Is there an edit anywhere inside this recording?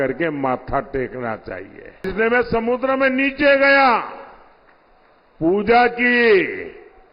yes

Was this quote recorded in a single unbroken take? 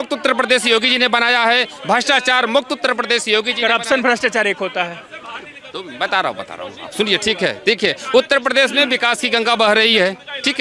yes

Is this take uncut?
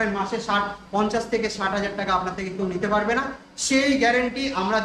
yes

